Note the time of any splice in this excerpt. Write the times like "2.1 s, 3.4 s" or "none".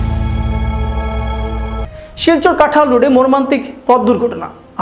none